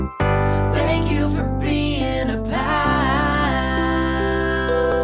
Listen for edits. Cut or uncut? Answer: uncut